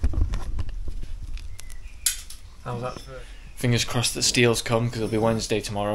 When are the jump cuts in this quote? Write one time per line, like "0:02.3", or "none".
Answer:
0:03.0